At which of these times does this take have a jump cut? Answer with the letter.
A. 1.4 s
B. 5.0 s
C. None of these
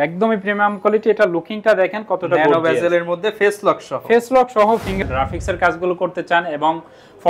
B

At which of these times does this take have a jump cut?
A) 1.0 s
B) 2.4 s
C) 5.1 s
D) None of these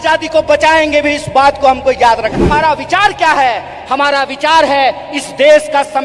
B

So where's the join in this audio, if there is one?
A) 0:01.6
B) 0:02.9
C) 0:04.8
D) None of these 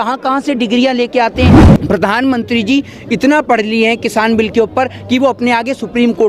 A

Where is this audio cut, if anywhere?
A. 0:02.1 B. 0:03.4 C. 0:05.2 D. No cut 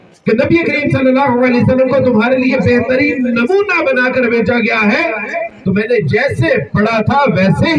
D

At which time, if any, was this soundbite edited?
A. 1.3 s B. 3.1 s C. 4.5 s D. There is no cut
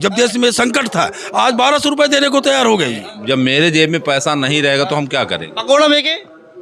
B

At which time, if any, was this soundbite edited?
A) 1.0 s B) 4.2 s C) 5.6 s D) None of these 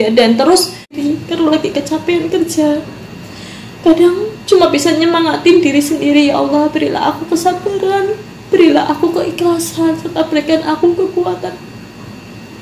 A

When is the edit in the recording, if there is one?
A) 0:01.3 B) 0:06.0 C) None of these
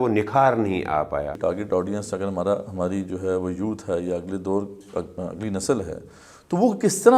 A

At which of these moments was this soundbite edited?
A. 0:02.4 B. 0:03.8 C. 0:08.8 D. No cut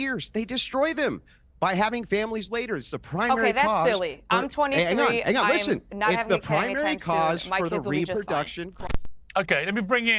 C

